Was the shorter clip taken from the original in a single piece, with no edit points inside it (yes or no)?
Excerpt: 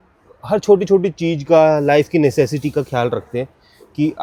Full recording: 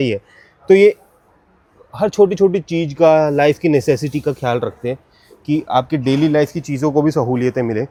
yes